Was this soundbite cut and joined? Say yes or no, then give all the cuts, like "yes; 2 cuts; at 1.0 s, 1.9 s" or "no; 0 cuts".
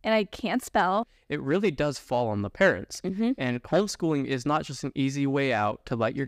yes; 1 cut; at 1.2 s